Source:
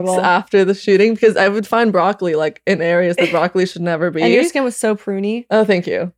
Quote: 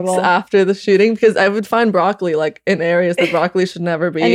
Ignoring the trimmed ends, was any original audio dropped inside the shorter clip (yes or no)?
no